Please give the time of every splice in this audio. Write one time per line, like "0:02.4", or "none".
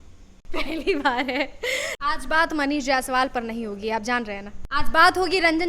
0:01.9
0:04.5